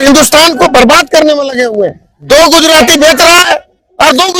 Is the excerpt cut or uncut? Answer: uncut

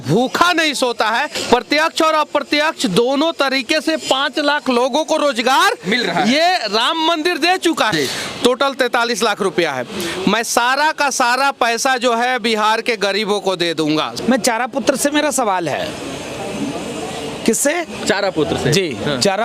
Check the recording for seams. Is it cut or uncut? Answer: cut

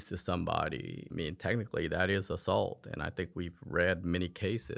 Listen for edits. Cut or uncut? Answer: cut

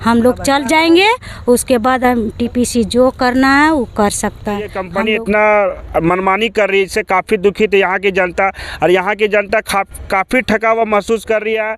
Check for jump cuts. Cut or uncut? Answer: cut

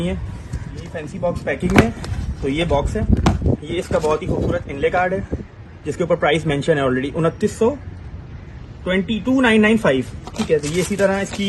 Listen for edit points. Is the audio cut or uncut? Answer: cut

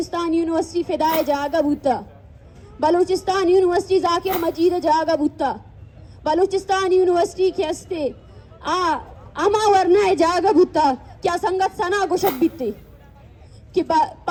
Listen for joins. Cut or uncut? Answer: uncut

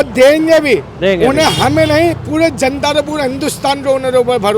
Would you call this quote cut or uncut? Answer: uncut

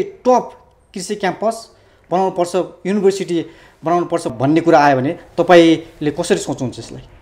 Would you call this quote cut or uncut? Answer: uncut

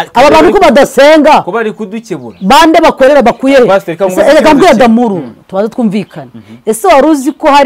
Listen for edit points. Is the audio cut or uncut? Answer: uncut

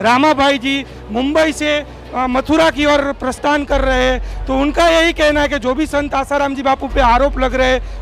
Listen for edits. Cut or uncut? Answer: uncut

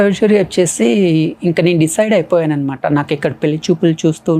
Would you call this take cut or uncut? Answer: uncut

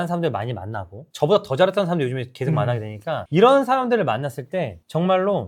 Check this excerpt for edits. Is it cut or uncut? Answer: uncut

